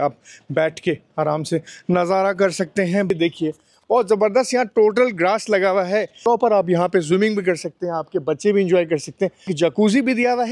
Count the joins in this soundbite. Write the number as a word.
three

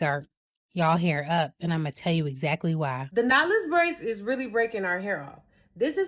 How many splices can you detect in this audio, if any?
one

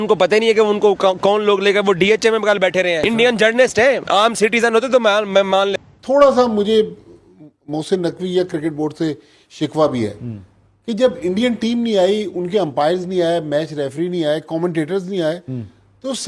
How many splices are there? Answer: two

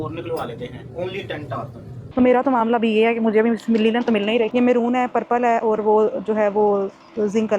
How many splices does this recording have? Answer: two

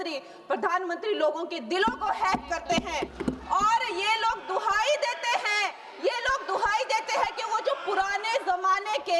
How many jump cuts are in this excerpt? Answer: one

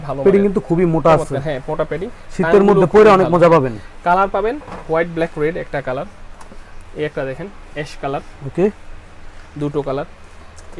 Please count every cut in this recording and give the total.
zero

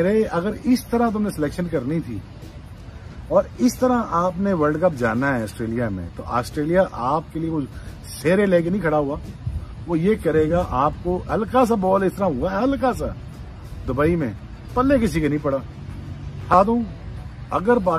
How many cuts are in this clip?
one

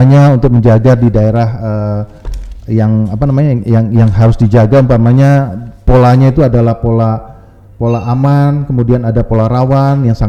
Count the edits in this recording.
zero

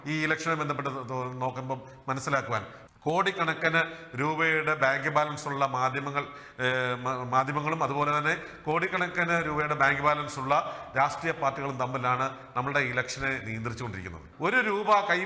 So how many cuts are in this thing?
two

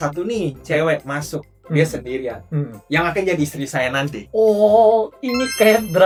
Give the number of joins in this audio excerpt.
zero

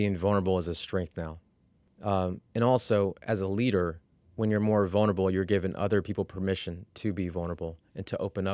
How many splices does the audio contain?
zero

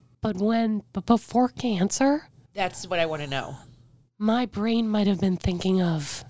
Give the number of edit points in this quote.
one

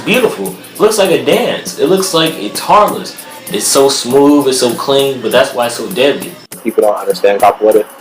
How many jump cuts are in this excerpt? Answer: one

